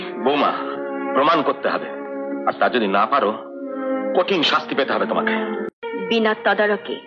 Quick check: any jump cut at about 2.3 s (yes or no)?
no